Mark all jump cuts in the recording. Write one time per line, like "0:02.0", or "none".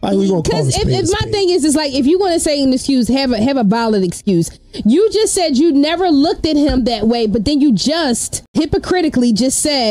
0:08.3